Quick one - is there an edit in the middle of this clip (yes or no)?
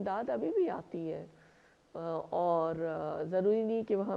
no